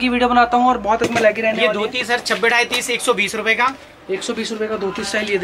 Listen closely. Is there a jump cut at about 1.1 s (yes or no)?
yes